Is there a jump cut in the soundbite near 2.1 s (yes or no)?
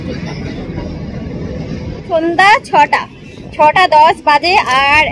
yes